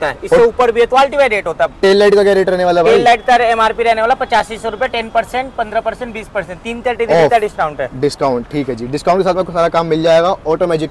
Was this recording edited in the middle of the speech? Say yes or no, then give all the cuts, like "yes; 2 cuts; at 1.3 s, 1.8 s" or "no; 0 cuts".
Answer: no; 0 cuts